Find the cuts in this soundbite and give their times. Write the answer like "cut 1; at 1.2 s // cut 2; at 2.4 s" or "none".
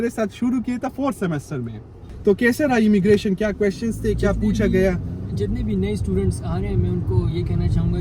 cut 1; at 2.0 s